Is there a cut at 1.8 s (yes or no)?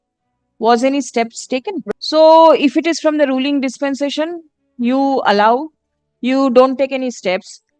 yes